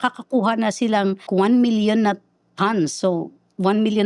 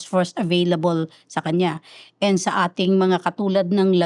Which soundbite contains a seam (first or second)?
first